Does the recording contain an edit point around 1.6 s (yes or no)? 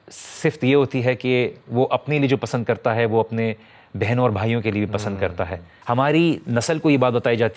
no